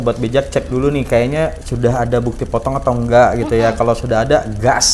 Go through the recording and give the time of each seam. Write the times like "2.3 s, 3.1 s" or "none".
none